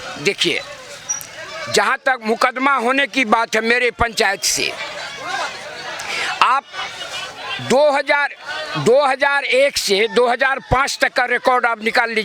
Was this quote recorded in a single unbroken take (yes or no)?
yes